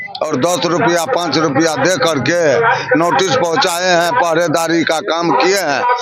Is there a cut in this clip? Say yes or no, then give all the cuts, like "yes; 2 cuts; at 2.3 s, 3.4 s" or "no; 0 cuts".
no; 0 cuts